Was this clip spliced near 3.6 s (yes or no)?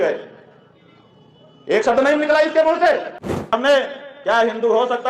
yes